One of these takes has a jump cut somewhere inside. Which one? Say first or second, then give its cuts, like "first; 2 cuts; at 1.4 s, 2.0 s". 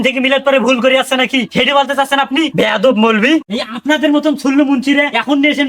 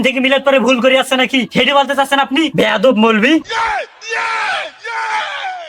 first; 1 cut; at 3.5 s